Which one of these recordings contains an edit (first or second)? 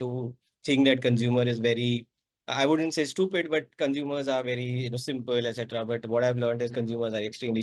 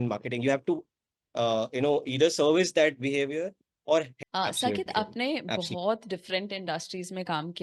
second